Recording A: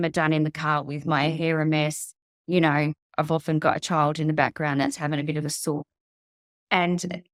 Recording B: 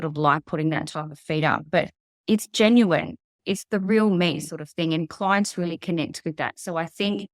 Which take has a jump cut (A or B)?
B